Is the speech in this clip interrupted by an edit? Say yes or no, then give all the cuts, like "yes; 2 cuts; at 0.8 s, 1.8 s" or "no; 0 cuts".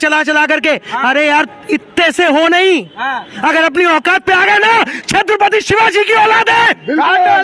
no; 0 cuts